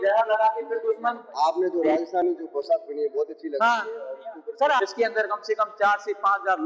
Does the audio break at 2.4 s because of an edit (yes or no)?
no